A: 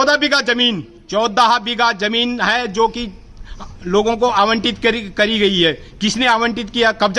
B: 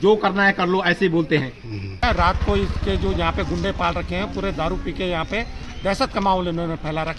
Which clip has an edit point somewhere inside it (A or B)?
B